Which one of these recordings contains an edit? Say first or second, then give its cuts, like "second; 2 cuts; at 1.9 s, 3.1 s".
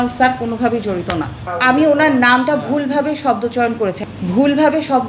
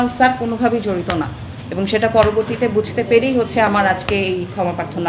first; 2 cuts; at 1.4 s, 4.0 s